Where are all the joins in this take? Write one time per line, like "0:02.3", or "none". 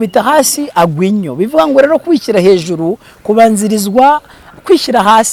none